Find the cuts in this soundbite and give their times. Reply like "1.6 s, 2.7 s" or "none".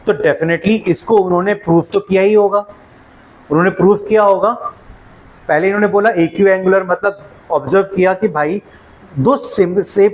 none